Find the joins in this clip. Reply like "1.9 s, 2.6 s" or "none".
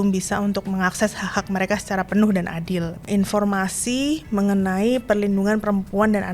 3.0 s